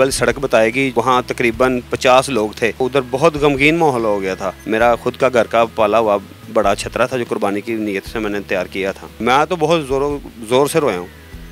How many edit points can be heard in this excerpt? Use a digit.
3